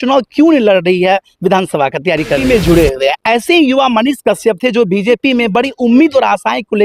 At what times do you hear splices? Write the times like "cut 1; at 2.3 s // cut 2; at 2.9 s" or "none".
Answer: cut 1; at 2.4 s